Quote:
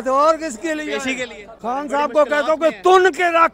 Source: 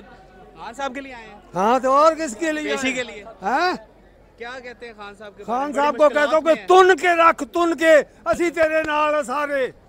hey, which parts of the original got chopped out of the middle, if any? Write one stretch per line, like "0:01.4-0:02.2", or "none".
0:03.2-0:05.3